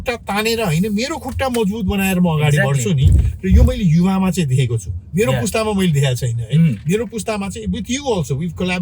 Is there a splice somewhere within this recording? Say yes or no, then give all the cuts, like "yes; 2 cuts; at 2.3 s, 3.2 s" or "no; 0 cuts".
no; 0 cuts